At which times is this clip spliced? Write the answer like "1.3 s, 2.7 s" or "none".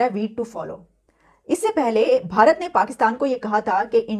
none